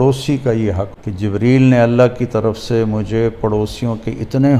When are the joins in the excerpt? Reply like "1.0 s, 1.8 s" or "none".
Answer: 0.9 s